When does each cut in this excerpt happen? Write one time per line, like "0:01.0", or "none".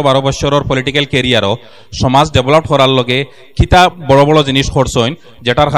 none